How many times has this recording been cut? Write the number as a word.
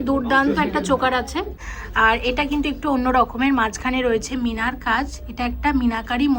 one